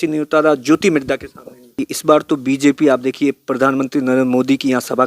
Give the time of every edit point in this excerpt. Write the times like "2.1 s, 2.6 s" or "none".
1.8 s